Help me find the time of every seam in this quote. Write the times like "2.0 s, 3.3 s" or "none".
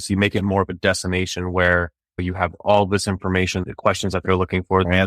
3.6 s